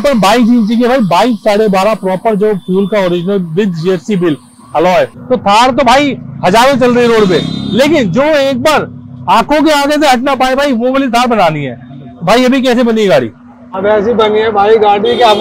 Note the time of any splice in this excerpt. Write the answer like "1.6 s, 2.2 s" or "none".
5.2 s

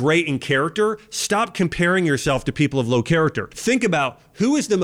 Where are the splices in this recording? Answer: 3.5 s

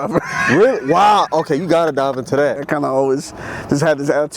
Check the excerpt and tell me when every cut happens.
2.7 s

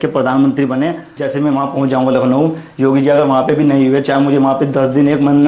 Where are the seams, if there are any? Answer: 1.2 s

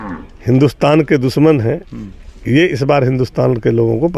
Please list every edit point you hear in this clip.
none

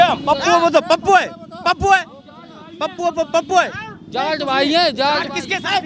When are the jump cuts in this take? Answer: none

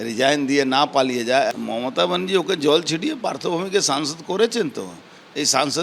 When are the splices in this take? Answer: 1.5 s

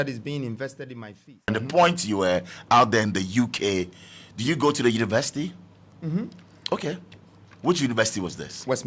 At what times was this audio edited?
1.5 s

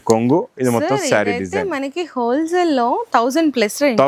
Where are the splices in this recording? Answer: none

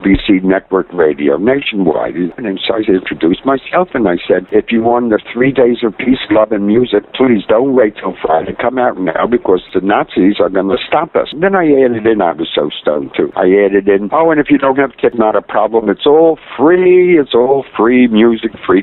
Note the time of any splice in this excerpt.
2.3 s, 9.7 s, 11.3 s

